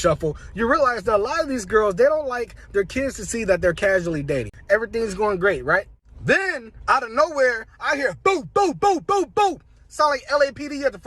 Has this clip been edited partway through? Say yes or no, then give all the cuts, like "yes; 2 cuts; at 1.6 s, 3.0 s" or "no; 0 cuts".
yes; 1 cut; at 4.5 s